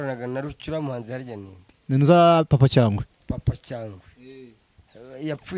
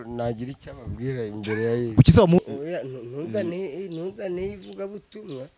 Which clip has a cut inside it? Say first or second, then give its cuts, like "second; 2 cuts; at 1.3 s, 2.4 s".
second; 1 cut; at 2.4 s